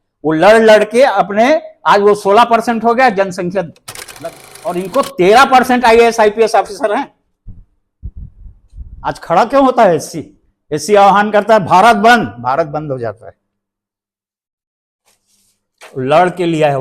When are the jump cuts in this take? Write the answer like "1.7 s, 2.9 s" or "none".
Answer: 4.1 s